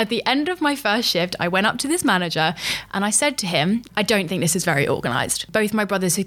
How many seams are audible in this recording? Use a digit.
2